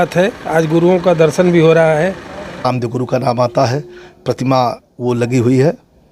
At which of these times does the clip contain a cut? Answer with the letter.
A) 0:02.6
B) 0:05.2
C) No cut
A